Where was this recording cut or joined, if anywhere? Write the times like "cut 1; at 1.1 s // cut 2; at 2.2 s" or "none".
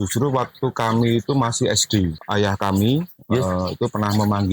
cut 1; at 2.2 s